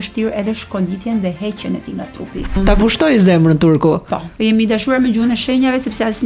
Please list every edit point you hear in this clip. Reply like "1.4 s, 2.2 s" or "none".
2.6 s

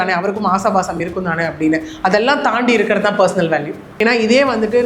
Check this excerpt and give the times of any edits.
3.8 s

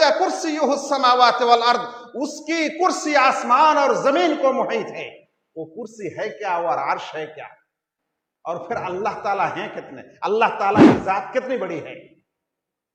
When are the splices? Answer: none

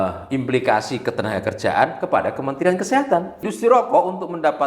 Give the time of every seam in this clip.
3.5 s

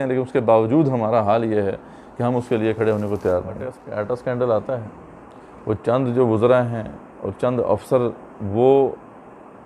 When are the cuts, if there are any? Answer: 3.9 s

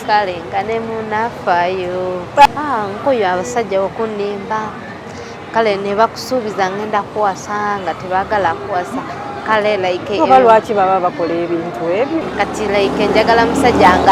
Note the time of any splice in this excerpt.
2.4 s, 12.2 s

